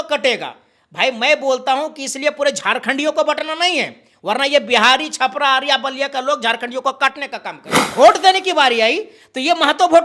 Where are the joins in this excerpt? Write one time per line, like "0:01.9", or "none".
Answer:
0:07.7